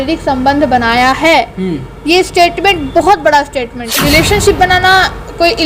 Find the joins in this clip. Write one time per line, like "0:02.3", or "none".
0:03.8